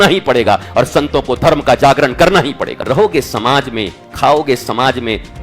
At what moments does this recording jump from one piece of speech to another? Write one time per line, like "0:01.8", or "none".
0:02.7